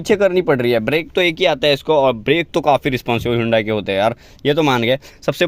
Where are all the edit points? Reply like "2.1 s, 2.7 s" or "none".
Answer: none